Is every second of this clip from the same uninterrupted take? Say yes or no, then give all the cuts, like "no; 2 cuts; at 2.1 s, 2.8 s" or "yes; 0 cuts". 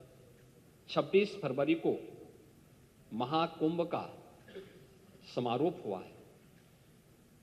yes; 0 cuts